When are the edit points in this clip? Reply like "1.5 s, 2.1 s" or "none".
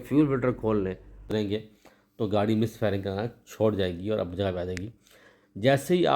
1.3 s